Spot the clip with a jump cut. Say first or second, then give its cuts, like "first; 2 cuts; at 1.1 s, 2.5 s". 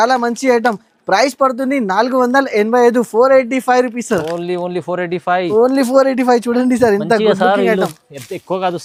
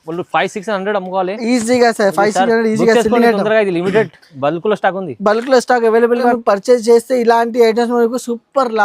second; 1 cut; at 6.3 s